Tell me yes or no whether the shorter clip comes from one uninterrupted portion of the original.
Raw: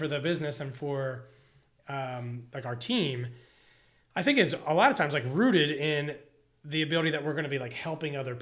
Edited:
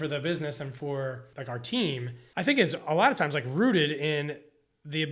no